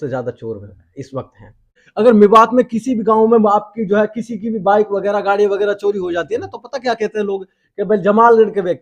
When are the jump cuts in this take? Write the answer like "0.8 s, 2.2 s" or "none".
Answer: 1.8 s